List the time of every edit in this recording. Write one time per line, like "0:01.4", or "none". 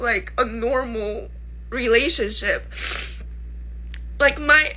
0:02.7